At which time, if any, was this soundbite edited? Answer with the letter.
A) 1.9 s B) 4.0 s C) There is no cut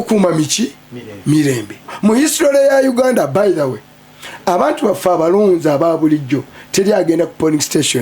A